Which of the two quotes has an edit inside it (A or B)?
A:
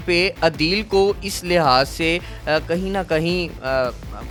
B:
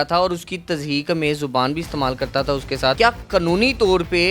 B